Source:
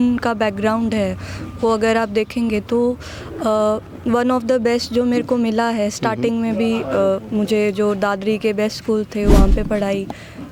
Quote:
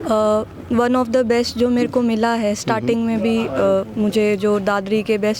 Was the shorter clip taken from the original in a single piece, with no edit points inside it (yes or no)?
yes